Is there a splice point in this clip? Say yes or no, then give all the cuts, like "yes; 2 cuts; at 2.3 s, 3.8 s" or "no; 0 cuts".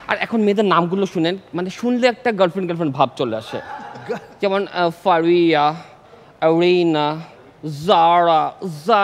no; 0 cuts